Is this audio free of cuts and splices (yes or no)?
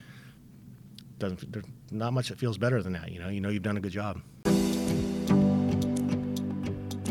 no